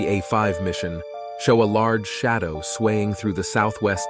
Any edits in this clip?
no; 0 cuts

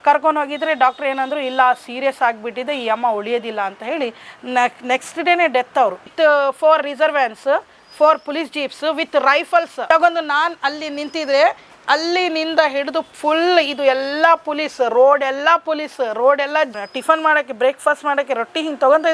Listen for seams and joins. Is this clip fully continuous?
no; 3 cuts; at 6.0 s, 9.8 s, 16.8 s

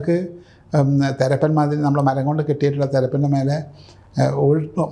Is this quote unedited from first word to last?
yes; 0 cuts

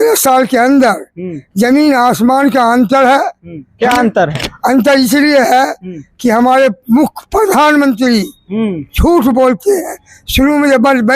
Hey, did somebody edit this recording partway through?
no; 0 cuts

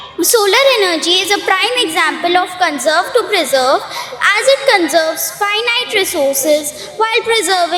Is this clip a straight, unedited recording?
yes; 0 cuts

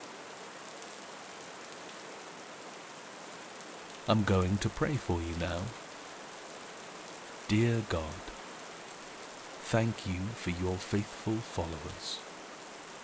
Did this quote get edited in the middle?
no; 0 cuts

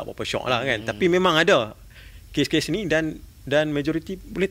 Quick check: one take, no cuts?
yes; 0 cuts

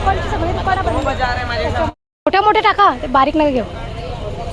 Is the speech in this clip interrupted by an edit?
yes; 1 cut; at 1.9 s

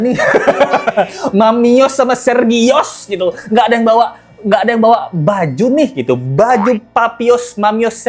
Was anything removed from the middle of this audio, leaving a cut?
no; 0 cuts

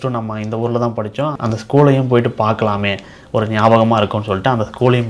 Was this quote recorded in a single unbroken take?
no; 1 cut; at 1.4 s

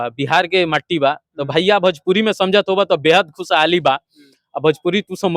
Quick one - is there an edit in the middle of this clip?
no; 0 cuts

